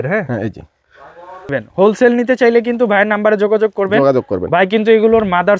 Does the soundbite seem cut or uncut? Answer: cut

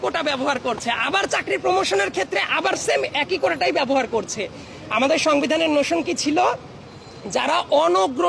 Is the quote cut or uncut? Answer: uncut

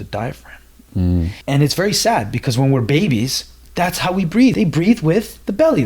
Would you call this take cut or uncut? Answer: cut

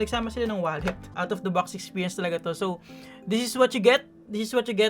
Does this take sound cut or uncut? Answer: cut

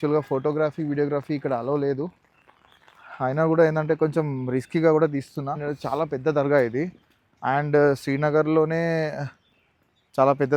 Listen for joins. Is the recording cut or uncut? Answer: uncut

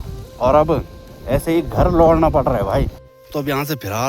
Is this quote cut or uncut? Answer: cut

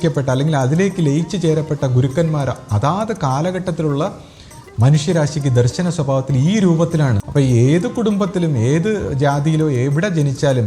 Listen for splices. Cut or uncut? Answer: cut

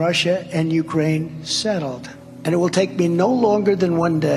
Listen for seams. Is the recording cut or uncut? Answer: uncut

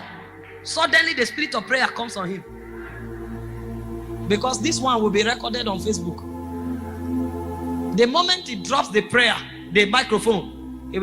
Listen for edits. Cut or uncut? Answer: uncut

